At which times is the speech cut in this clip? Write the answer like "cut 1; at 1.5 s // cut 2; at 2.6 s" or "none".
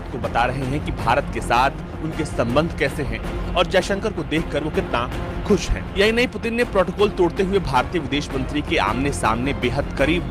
none